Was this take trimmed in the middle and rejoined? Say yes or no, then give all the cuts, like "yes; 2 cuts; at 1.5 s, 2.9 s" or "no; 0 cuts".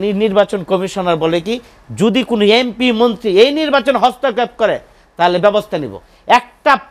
no; 0 cuts